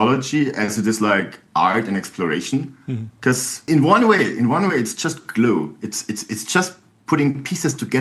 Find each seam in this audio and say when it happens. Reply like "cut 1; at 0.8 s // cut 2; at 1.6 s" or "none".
cut 1; at 3.5 s